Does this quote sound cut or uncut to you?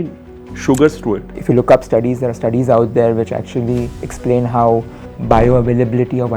cut